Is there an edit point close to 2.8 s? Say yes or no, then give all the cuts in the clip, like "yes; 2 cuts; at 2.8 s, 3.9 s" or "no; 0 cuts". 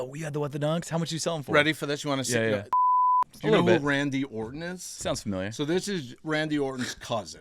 yes; 1 cut; at 2.8 s